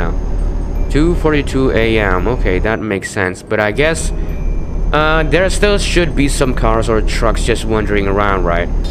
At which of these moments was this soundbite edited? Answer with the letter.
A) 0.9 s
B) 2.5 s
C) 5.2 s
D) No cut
D